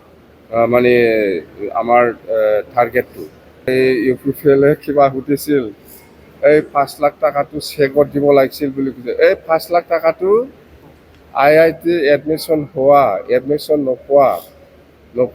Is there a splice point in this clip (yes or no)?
yes